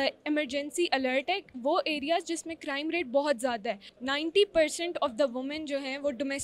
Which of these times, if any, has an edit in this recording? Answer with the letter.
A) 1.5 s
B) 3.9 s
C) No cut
B